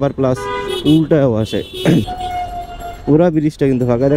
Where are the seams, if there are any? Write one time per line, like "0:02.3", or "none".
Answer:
0:02.1